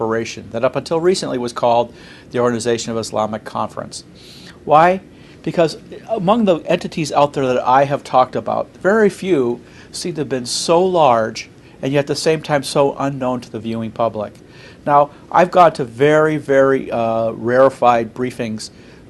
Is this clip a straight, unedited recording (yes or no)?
yes